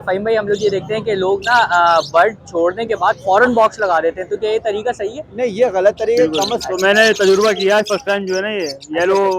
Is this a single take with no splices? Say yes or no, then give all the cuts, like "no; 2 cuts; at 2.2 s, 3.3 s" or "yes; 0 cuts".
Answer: no; 1 cut; at 6.5 s